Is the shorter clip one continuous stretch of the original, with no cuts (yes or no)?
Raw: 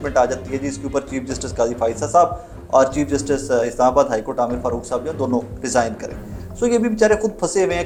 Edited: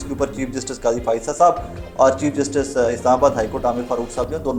yes